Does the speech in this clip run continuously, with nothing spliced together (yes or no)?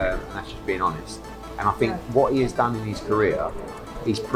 yes